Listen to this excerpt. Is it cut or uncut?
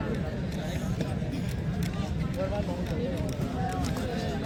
uncut